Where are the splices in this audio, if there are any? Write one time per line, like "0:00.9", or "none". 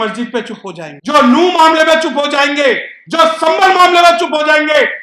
0:00.9